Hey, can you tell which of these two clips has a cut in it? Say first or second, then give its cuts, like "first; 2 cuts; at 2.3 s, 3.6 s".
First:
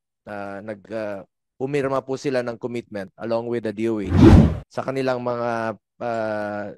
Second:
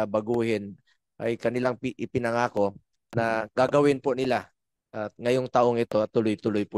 first; 2 cuts; at 4.1 s, 4.5 s